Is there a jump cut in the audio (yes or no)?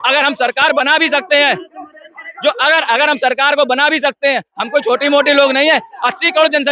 no